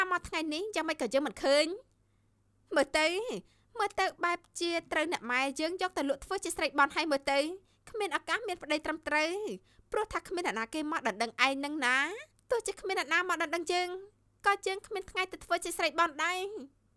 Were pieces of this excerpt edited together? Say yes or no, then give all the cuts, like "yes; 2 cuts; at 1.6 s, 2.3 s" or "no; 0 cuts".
no; 0 cuts